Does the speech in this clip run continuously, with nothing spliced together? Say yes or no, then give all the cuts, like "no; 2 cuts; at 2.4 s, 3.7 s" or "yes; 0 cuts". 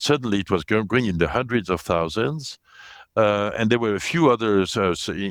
yes; 0 cuts